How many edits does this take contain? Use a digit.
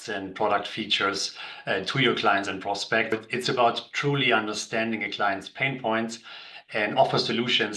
1